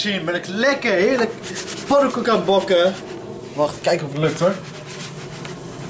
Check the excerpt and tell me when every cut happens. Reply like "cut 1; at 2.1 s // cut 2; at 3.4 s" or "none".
none